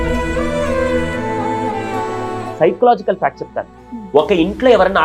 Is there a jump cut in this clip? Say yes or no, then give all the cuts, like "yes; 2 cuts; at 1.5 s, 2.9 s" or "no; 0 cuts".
yes; 1 cut; at 2.5 s